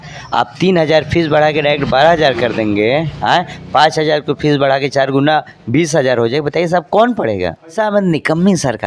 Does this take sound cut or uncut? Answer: cut